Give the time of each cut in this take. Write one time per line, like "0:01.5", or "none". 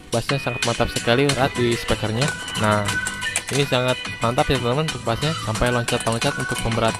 0:01.4